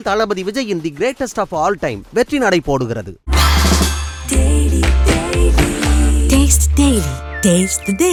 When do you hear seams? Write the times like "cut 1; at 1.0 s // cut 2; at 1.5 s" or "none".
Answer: none